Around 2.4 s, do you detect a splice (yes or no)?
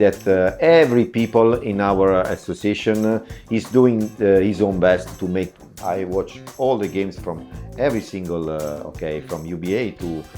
no